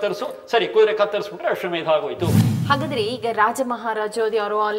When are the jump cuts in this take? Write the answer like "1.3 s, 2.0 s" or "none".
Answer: 2.5 s